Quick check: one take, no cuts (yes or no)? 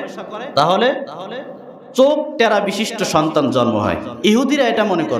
no